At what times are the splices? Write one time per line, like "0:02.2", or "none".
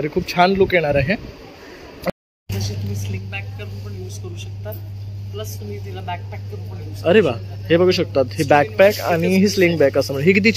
0:02.1